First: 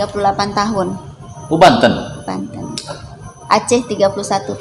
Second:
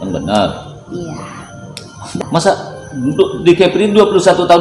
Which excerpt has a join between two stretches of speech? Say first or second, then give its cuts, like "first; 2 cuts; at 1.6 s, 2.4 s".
second; 1 cut; at 2.2 s